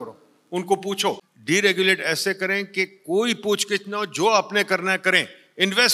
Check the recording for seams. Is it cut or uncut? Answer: cut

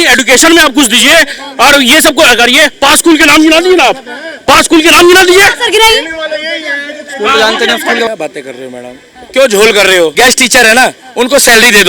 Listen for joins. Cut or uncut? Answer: cut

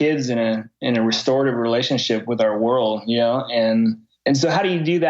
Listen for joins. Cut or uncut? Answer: cut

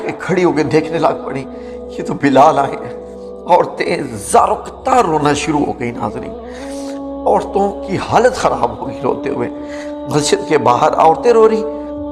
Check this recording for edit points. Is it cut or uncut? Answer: uncut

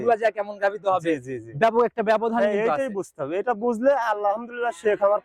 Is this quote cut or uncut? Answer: uncut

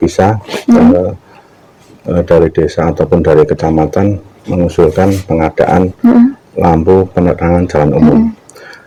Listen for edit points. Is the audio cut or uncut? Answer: uncut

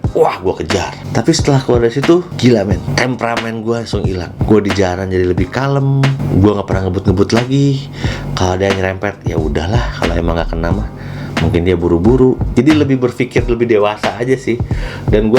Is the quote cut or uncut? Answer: cut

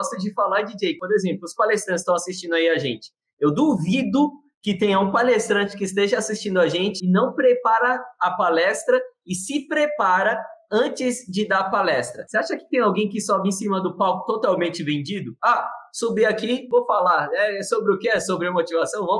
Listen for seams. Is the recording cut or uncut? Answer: cut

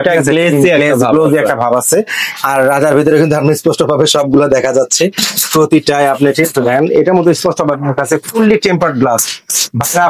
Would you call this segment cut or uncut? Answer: uncut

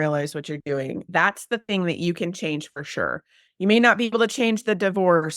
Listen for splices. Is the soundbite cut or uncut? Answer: cut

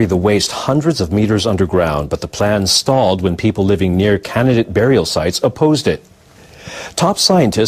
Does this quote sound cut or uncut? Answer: cut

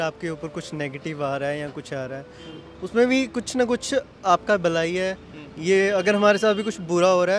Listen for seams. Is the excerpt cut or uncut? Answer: uncut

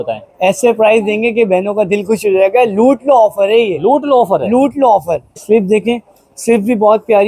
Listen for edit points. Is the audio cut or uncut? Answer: cut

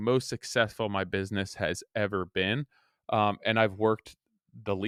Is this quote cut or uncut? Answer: uncut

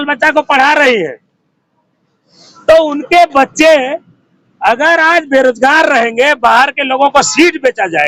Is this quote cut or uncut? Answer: uncut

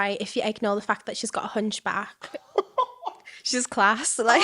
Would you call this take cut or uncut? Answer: uncut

